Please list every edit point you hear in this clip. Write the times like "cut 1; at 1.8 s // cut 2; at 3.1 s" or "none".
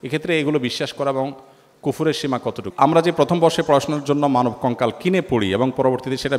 cut 1; at 2.6 s